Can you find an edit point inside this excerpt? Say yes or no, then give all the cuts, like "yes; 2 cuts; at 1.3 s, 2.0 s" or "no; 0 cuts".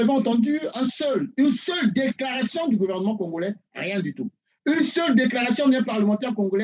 no; 0 cuts